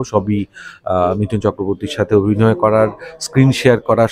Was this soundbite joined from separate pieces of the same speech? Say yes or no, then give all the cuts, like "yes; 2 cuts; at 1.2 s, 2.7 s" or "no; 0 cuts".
no; 0 cuts